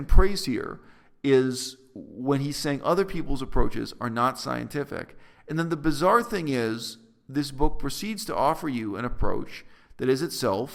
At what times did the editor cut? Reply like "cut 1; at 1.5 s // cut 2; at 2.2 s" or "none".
none